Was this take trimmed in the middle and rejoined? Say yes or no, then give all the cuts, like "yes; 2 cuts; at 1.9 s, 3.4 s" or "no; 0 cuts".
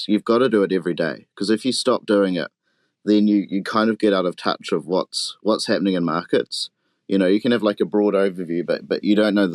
no; 0 cuts